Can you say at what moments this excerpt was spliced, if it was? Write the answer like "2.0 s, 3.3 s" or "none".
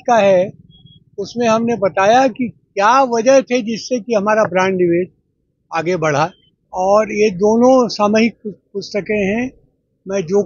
6.5 s